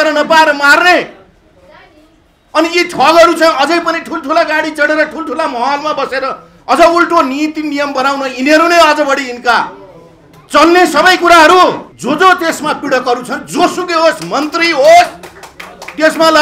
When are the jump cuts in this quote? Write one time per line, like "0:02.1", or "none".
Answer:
0:11.9